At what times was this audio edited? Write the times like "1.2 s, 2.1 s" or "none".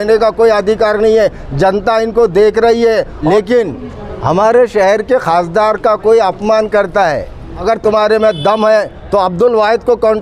3.1 s, 7.5 s